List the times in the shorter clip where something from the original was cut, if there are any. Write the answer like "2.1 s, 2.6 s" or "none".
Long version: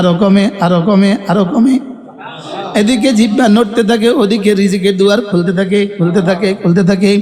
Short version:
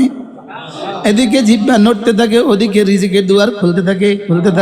none